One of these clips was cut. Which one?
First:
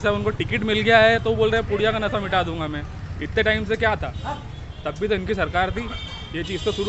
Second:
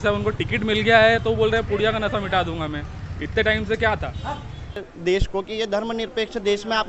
second; 1 cut; at 4.9 s

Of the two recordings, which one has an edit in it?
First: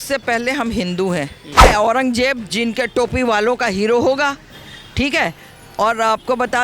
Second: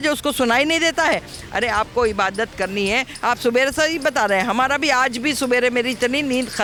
first; 1 cut; at 1.6 s

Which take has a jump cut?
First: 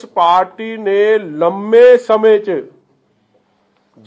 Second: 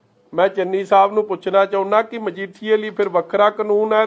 first; 1 cut; at 1.9 s

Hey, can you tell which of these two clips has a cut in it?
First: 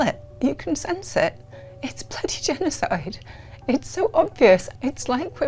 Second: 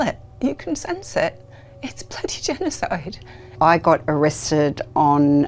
second; 1 cut; at 3.5 s

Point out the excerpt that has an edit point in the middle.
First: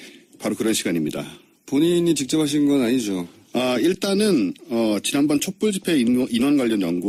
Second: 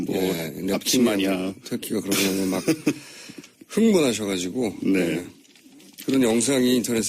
second; 1 cut; at 4.9 s

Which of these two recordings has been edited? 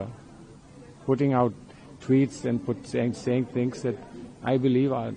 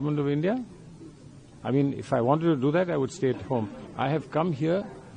second; 1 cut; at 3.8 s

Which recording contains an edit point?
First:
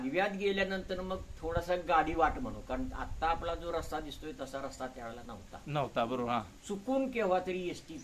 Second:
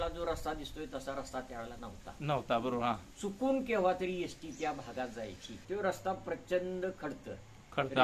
second; 1 cut; at 5.5 s

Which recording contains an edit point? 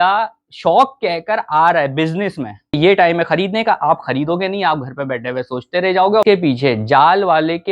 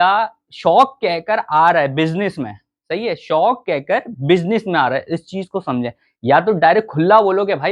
first; 2 cuts; at 2.8 s, 6.2 s

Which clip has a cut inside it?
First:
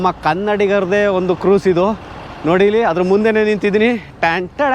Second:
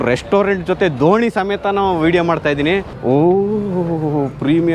second; 1 cut; at 2.9 s

